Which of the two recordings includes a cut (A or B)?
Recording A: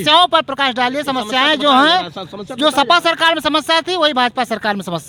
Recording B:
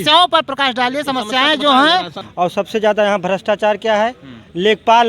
B